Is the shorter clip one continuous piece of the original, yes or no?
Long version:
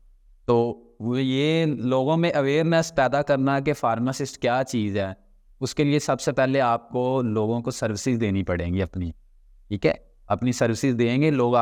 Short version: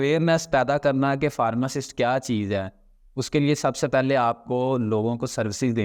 yes